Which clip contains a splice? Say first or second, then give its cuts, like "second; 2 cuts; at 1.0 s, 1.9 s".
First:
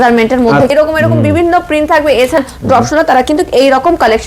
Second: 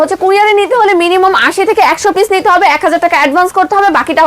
first; 2 cuts; at 0.7 s, 2.4 s